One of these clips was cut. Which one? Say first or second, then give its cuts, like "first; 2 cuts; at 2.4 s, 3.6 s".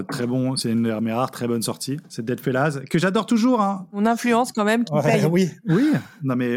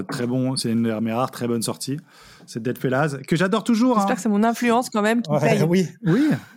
first; 1 cut; at 2.1 s